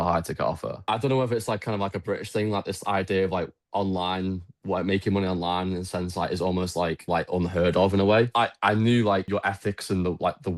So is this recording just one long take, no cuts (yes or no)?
no